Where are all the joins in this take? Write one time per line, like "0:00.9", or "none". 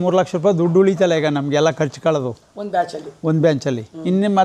none